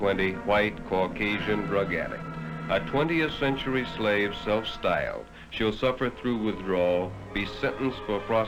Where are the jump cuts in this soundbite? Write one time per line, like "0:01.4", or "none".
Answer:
none